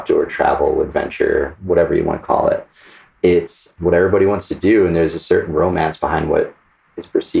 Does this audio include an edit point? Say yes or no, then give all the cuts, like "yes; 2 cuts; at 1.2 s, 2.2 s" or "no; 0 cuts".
yes; 1 cut; at 3.6 s